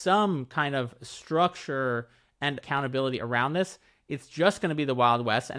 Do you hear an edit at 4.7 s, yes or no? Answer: no